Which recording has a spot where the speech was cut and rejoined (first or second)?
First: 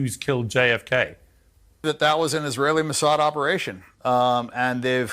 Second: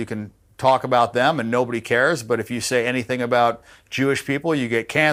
first